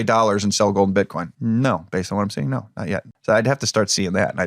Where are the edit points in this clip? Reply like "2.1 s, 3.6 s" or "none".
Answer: 1.2 s, 3.1 s